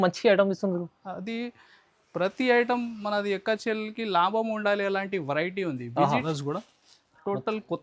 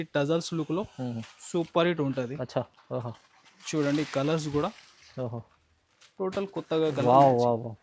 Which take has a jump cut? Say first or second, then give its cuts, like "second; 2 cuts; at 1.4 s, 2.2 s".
first; 1 cut; at 6.2 s